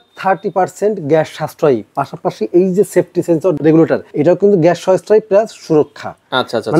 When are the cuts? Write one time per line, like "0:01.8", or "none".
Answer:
0:03.6